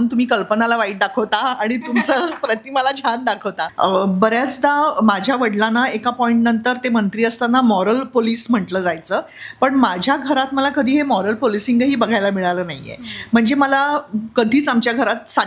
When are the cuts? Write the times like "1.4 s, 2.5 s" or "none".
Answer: 3.7 s